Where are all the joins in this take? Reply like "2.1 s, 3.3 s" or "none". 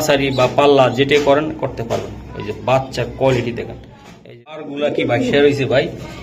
4.6 s